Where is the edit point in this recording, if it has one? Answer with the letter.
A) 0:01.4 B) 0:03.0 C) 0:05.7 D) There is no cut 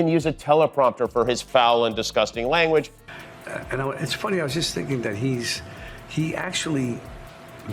B